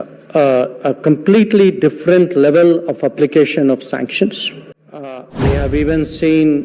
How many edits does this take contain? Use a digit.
1